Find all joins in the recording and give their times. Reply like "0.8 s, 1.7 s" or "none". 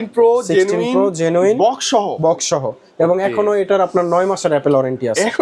none